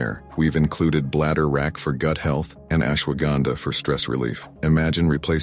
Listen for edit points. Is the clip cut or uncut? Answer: uncut